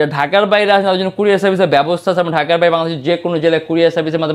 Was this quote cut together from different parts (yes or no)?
no